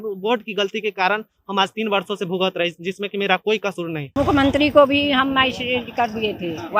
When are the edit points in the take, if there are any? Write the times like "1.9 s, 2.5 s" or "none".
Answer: 4.0 s